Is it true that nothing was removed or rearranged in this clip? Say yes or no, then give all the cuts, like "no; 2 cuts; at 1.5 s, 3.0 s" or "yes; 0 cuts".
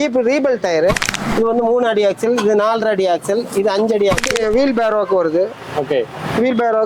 no; 2 cuts; at 1.1 s, 4.3 s